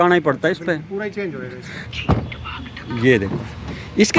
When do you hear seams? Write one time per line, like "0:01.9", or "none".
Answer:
0:01.9